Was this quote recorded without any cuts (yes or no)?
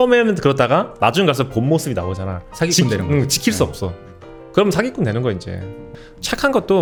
yes